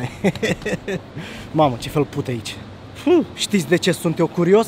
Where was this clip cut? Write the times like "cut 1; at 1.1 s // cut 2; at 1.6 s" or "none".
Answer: cut 1; at 3.3 s